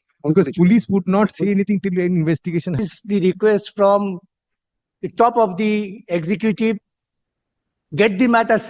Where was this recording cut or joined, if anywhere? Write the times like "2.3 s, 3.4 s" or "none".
2.8 s